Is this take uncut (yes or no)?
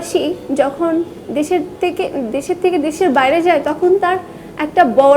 yes